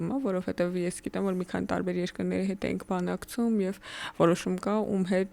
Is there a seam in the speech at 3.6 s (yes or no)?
no